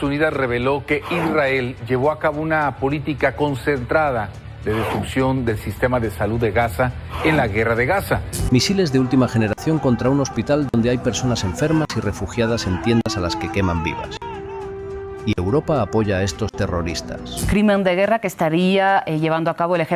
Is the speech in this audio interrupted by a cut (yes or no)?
no